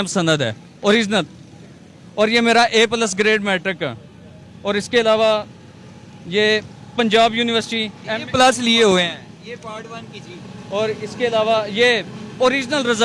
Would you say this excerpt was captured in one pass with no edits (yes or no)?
yes